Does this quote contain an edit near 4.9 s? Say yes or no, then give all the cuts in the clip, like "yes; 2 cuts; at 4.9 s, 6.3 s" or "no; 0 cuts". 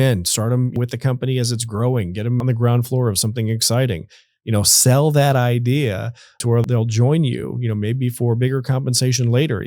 no; 3 cuts; at 0.7 s, 2.4 s, 6.5 s